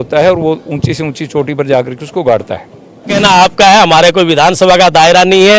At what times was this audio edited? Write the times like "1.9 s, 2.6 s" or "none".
3.1 s